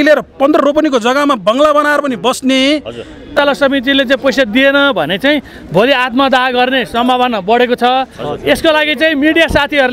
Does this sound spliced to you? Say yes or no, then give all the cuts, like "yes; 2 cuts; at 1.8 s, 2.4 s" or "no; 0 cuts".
yes; 1 cut; at 3.3 s